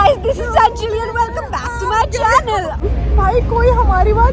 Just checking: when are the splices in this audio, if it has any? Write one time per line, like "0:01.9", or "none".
0:02.8